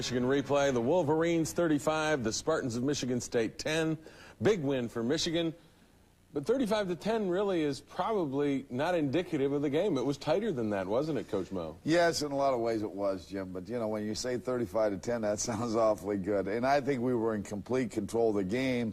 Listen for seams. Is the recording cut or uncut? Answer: cut